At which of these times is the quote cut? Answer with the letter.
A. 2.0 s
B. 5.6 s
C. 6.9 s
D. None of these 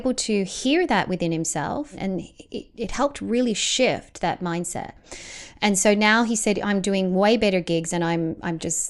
A